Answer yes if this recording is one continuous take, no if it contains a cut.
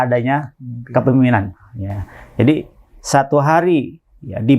yes